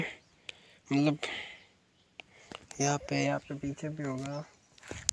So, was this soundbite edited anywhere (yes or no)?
no